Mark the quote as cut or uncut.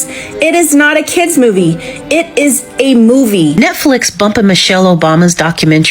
cut